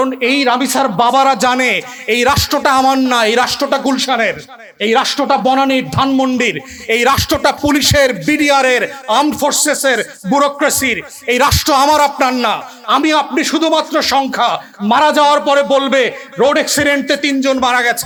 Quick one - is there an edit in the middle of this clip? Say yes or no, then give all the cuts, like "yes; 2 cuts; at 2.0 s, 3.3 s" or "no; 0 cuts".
no; 0 cuts